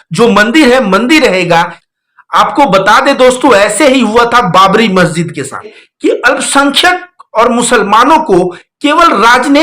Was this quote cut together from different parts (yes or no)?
yes